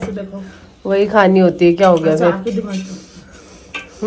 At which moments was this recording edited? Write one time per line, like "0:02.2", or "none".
none